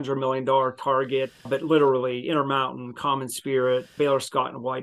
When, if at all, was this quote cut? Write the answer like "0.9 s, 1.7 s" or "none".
1.4 s, 3.9 s